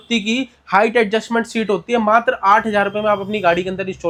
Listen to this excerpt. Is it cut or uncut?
uncut